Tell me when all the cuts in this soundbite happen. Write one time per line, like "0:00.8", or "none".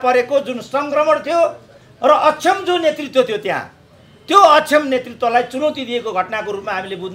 none

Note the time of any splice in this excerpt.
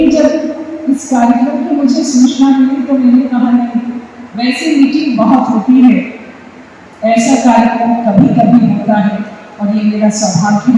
none

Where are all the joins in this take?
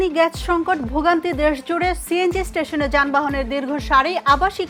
none

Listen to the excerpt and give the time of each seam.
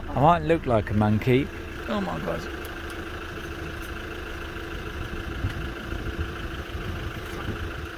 none

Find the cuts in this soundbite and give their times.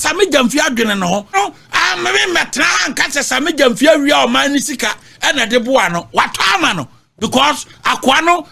0:01.3

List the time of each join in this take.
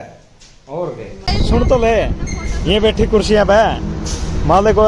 0:01.2

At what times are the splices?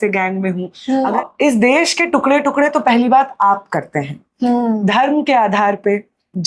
0:01.2

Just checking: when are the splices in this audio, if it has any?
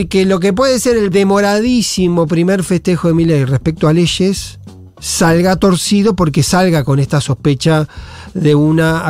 0:01.1

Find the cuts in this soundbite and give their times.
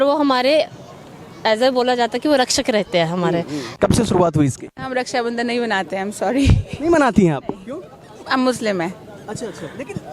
0:03.7

